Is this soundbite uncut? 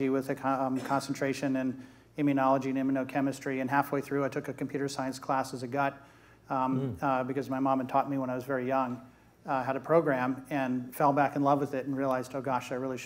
yes; 0 cuts

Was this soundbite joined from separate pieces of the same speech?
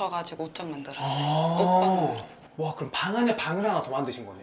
yes; 1 cut; at 2.4 s

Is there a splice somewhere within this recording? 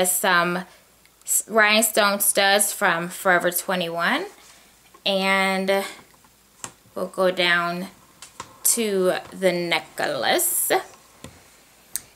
no; 0 cuts

